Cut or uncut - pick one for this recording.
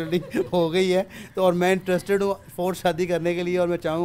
uncut